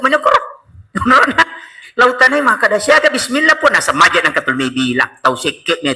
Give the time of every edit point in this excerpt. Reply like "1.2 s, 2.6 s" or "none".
none